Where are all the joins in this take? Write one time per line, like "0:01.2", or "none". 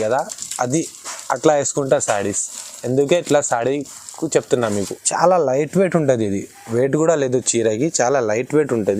0:05.0